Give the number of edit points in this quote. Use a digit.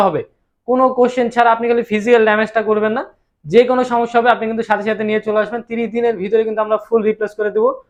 0